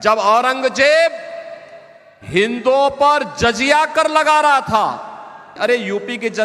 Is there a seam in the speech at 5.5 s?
yes; 1 cut; at 5.5 s

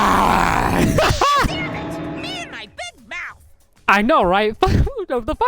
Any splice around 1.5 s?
yes; 1 cut; at 1.5 s

